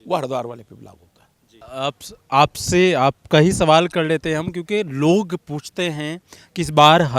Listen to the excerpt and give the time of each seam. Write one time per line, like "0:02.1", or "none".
0:01.6